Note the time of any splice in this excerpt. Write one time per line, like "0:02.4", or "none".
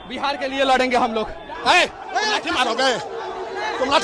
0:01.6